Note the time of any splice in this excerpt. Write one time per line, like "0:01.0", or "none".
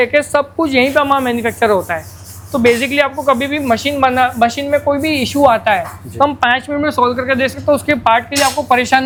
none